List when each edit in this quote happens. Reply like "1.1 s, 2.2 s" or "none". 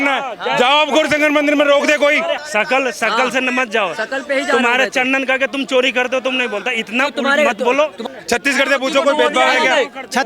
2.4 s, 8.0 s

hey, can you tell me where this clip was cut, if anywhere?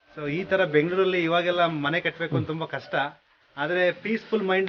none

